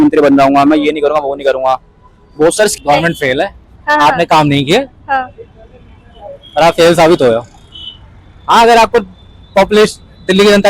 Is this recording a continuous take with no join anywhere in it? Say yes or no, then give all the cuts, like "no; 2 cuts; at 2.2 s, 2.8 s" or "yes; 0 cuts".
no; 1 cut; at 2.7 s